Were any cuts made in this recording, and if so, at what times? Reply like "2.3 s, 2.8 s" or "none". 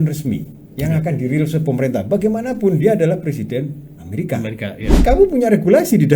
4.9 s

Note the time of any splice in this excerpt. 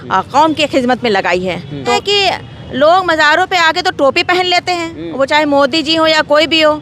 1.9 s

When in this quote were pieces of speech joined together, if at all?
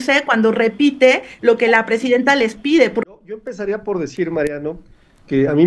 3.0 s

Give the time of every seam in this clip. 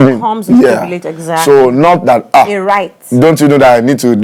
none

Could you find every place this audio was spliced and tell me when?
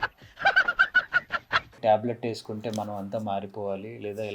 1.7 s

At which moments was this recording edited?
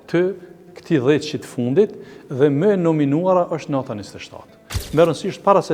4.8 s

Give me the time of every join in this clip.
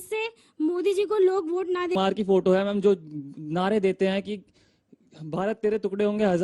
1.9 s

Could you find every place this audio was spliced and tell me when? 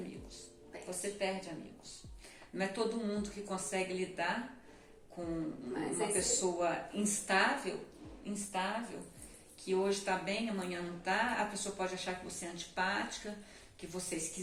none

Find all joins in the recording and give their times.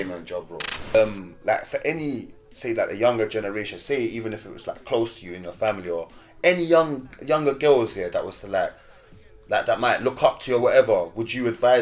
0.9 s

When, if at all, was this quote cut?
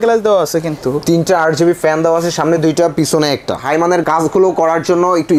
3.6 s

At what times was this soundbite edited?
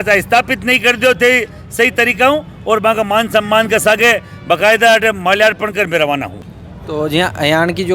none

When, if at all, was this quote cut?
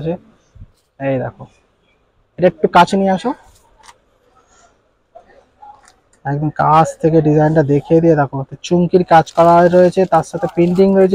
none

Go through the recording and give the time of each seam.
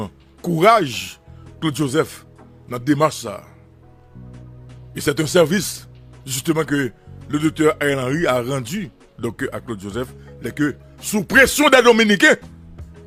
none

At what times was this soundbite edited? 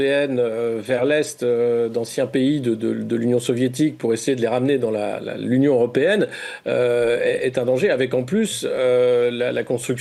none

